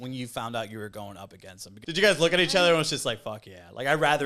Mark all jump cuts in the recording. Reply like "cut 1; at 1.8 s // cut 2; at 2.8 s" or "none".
cut 1; at 1.6 s